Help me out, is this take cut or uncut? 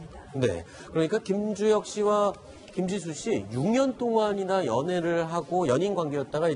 cut